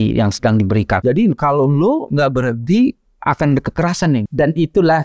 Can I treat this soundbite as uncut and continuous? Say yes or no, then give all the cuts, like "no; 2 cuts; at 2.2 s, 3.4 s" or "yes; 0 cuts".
no; 2 cuts; at 1.0 s, 4.3 s